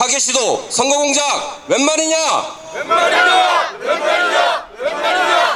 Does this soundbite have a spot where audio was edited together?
no; 0 cuts

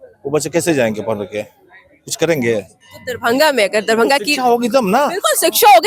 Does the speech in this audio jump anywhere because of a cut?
no; 0 cuts

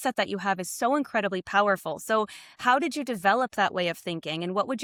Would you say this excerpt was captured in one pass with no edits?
yes; 0 cuts

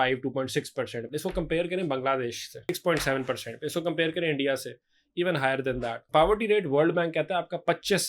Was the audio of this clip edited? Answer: yes; 3 cuts; at 1.0 s, 2.7 s, 6.0 s

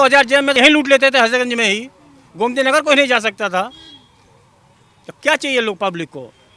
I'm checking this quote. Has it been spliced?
no; 0 cuts

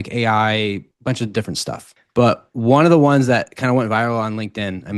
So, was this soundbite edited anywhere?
no; 0 cuts

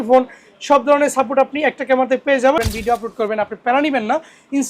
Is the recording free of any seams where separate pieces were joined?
no; 1 cut; at 2.6 s

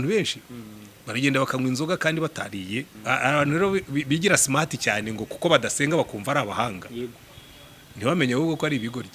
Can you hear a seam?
yes; 1 cut; at 2.9 s

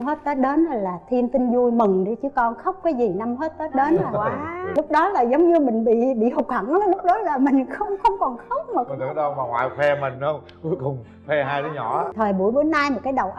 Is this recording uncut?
no; 2 cuts; at 4.7 s, 12.1 s

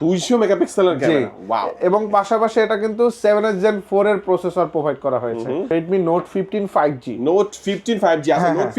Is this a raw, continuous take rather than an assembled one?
no; 1 cut; at 5.7 s

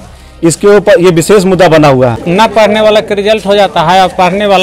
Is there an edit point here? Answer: yes; 1 cut; at 2.2 s

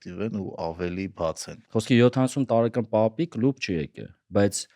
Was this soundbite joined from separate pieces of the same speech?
yes; 1 cut; at 1.5 s

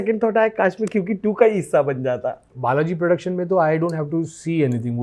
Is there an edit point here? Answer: yes; 1 cut; at 2.5 s

